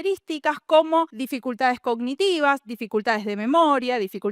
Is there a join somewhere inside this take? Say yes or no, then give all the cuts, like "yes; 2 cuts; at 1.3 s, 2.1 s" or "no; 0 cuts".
yes; 1 cut; at 1.2 s